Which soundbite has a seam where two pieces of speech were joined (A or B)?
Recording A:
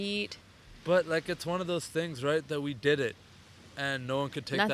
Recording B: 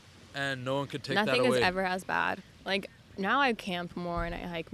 B